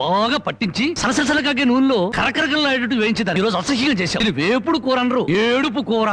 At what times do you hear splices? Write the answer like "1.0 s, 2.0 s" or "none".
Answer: 1.0 s, 2.1 s, 3.4 s, 4.2 s, 5.3 s